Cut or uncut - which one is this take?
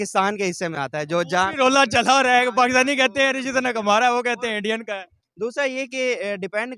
uncut